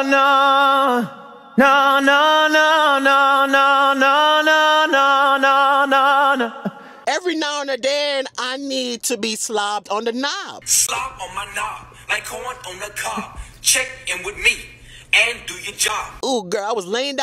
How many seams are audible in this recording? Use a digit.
2